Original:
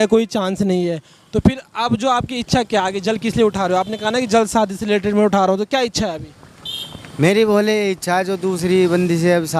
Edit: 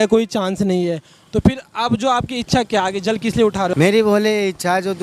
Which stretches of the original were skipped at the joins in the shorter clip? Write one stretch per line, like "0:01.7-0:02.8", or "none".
0:03.7-0:07.1